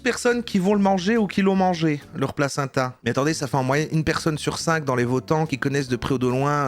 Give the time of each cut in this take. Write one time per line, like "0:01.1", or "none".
0:03.0
0:05.5